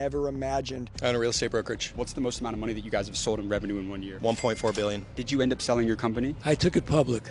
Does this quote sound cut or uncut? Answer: cut